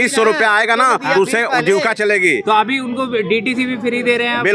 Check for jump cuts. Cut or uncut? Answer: uncut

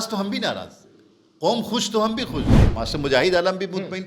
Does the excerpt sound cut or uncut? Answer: cut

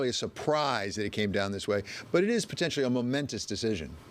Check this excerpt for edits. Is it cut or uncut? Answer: uncut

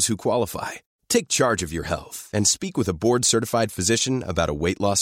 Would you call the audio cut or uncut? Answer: uncut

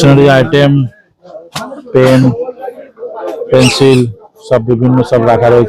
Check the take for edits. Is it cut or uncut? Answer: uncut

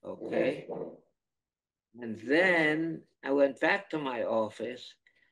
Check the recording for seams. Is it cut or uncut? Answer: cut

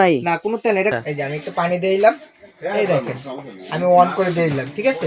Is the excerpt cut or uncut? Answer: cut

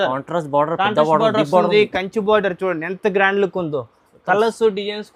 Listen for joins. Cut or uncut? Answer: uncut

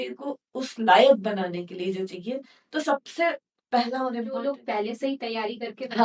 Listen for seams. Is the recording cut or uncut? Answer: cut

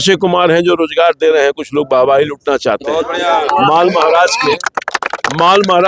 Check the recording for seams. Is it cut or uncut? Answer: uncut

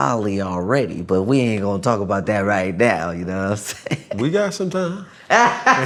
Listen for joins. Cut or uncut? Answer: uncut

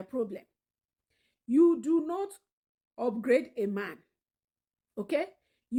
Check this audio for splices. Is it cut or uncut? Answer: uncut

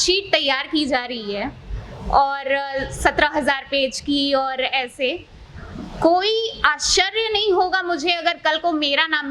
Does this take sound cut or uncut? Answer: uncut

